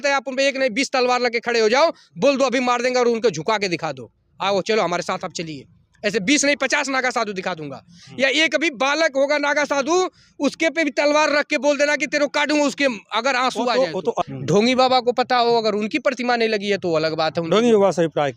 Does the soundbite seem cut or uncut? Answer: cut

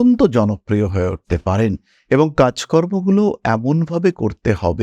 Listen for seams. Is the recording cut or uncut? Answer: uncut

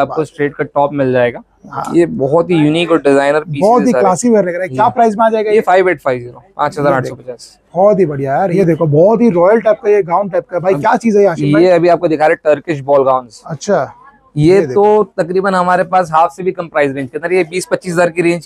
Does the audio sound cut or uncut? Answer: uncut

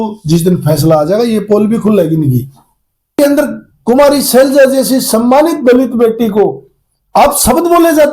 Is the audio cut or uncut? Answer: cut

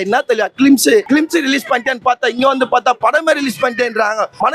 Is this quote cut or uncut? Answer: cut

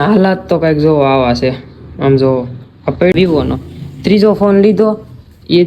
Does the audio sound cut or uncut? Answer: cut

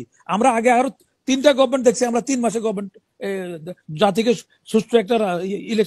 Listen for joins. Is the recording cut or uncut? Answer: uncut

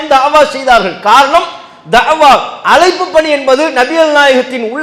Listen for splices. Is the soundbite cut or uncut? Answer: uncut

